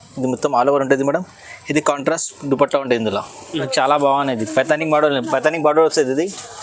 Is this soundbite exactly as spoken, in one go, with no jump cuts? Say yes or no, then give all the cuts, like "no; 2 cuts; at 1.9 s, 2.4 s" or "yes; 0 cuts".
no; 1 cut; at 3.7 s